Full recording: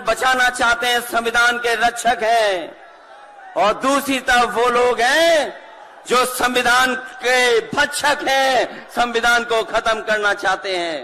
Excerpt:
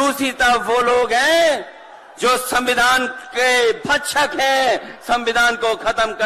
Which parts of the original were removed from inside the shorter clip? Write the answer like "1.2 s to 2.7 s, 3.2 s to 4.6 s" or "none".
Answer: none